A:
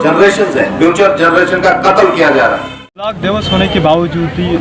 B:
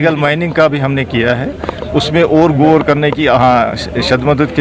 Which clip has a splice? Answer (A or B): A